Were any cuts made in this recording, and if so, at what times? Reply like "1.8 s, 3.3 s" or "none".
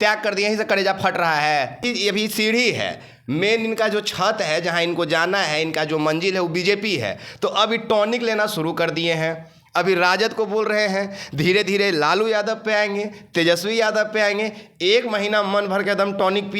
1.8 s